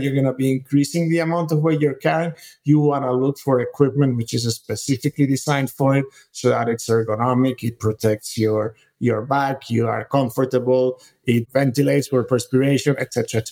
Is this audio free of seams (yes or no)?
no